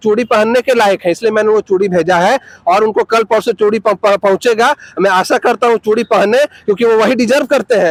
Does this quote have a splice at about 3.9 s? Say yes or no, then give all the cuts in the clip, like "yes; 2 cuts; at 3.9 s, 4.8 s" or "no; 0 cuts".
no; 0 cuts